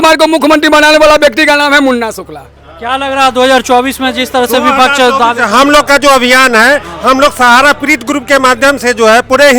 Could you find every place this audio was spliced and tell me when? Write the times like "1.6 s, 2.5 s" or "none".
none